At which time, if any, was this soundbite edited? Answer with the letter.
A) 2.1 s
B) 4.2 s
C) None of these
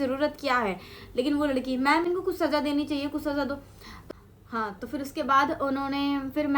C